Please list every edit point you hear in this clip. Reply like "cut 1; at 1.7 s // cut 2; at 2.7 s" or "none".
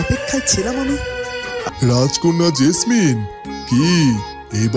cut 1; at 1.7 s